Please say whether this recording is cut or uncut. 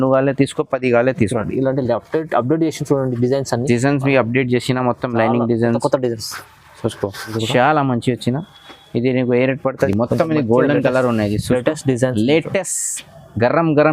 cut